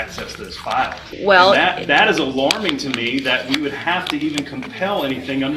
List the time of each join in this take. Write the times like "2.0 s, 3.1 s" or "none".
1.0 s